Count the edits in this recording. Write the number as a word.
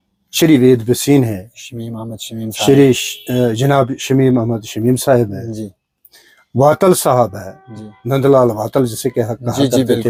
zero